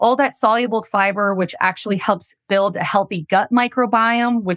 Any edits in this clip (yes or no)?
yes